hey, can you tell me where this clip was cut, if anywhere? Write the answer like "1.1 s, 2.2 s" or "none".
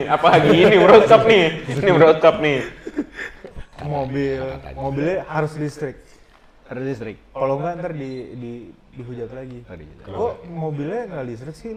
none